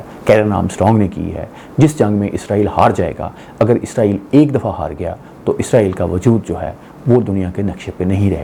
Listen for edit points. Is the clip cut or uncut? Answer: uncut